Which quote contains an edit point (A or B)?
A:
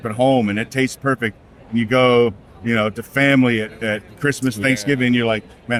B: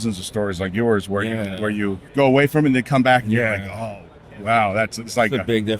B